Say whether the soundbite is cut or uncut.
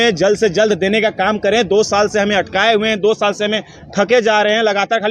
uncut